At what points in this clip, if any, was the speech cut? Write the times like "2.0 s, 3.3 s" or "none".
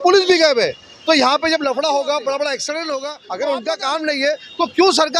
3.2 s